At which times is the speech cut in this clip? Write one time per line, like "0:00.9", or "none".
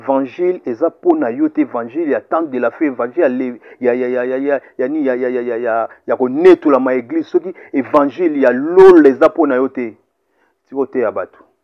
none